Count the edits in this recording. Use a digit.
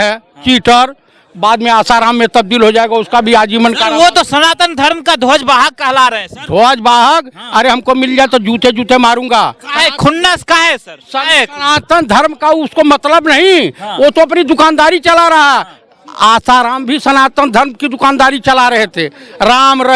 0